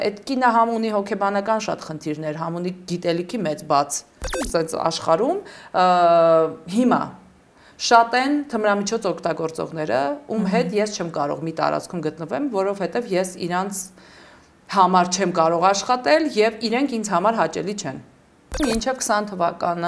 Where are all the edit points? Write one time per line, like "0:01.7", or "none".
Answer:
0:04.4
0:18.6